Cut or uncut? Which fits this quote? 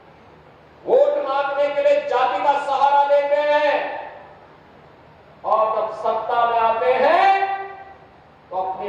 uncut